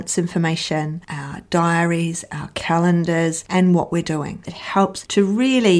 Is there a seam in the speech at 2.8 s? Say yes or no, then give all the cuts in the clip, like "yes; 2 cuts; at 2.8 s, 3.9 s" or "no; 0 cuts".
no; 1 cut; at 4.4 s